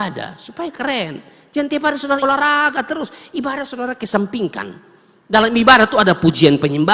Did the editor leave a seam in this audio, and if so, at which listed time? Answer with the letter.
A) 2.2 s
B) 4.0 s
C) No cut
A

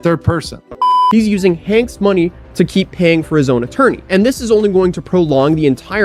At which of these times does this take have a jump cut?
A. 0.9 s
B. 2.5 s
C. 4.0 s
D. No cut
A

